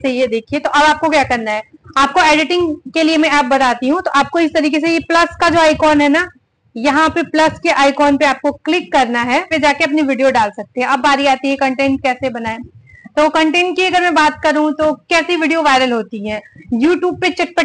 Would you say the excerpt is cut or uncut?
cut